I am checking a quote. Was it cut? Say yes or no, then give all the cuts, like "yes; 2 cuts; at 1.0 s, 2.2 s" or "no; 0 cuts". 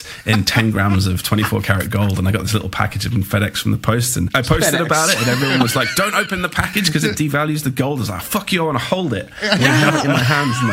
no; 0 cuts